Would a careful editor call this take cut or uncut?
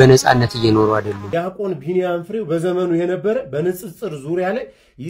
cut